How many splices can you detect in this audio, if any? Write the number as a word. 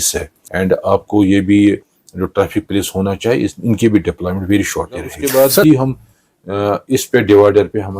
two